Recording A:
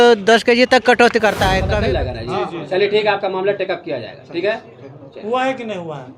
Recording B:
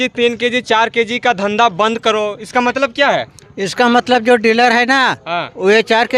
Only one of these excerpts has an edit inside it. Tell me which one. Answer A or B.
A